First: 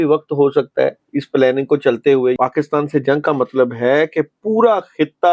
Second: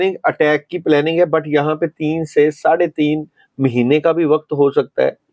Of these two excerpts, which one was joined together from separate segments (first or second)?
first